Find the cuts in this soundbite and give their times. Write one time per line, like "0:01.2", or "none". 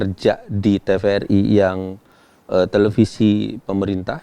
none